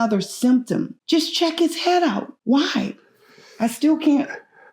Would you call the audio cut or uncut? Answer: cut